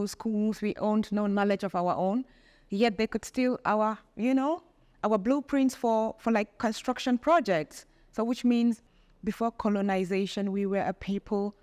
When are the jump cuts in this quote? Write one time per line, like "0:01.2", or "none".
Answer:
0:08.8